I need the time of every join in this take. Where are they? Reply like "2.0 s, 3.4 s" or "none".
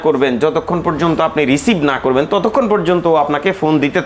none